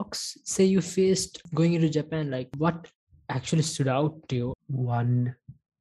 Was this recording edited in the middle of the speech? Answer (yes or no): yes